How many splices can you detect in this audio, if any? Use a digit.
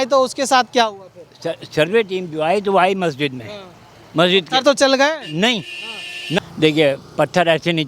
1